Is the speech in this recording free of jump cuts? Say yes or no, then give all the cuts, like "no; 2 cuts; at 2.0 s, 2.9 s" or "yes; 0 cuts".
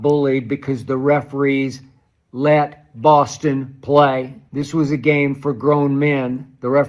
no; 1 cut; at 4.4 s